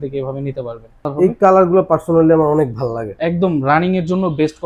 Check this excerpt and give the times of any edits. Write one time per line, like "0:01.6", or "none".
0:01.0